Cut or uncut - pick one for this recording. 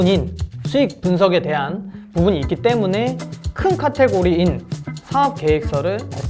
uncut